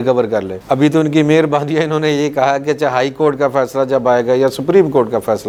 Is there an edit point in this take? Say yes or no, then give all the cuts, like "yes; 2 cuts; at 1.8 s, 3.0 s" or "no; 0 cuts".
no; 0 cuts